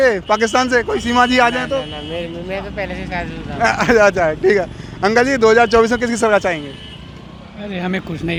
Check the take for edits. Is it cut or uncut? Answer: uncut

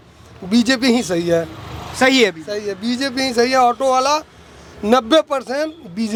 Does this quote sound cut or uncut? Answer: uncut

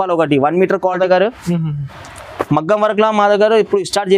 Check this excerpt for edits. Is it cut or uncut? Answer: cut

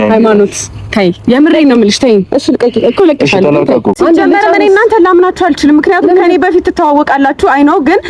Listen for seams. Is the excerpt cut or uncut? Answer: cut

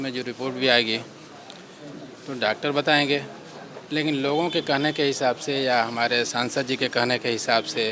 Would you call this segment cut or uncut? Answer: uncut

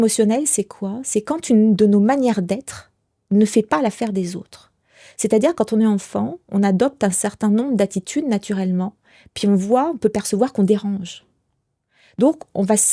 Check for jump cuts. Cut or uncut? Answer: uncut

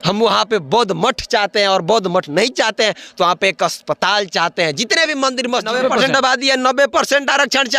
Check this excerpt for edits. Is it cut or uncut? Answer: cut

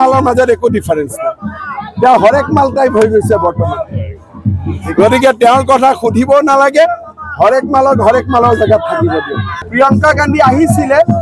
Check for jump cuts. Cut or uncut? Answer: cut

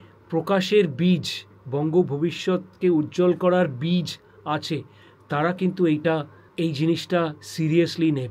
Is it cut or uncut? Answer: cut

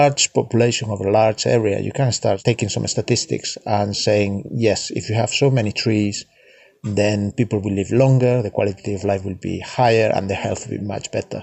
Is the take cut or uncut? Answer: cut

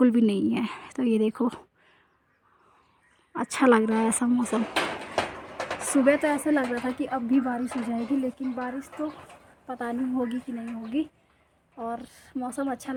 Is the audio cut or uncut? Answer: uncut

